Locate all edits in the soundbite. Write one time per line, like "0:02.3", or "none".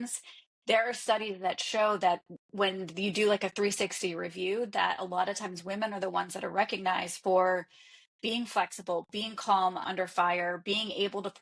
0:09.9